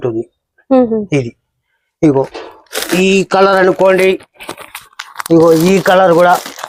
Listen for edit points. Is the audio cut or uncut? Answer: uncut